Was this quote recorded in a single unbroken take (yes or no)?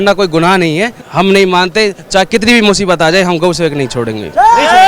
no